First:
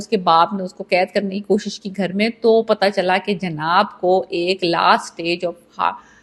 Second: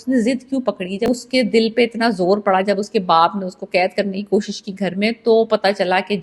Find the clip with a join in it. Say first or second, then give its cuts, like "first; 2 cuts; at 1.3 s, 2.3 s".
second; 1 cut; at 1.1 s